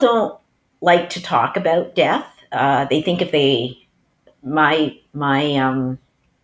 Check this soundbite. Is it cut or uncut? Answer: uncut